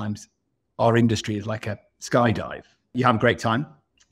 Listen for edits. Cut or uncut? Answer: cut